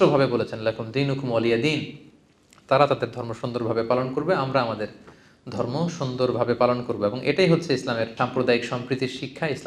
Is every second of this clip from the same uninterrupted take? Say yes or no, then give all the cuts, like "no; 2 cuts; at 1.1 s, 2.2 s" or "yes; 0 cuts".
no; 1 cut; at 8.1 s